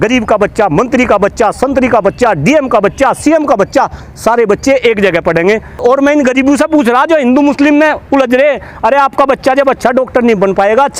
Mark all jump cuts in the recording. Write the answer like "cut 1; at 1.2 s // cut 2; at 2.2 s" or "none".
cut 1; at 5.8 s